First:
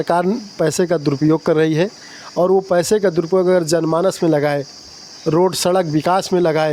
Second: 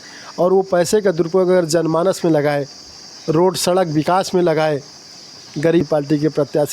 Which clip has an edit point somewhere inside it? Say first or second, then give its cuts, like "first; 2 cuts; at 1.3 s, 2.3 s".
second; 1 cut; at 5.8 s